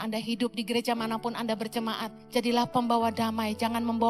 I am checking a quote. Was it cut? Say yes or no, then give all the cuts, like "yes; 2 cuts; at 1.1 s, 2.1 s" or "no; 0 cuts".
yes; 1 cut; at 2.1 s